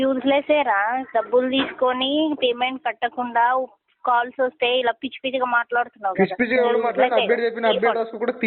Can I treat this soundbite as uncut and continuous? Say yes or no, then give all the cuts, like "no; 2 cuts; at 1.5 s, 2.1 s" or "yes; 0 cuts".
yes; 0 cuts